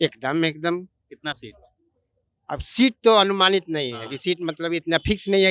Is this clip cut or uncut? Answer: uncut